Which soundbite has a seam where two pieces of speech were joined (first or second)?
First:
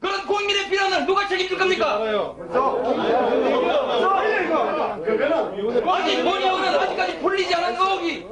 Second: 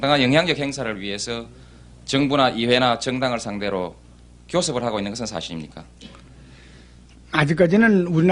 second